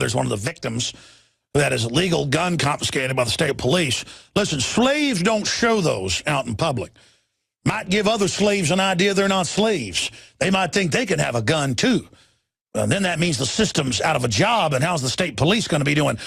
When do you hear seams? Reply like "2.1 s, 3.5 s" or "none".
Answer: none